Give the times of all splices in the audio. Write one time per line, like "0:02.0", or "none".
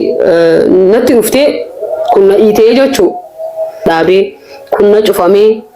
0:03.9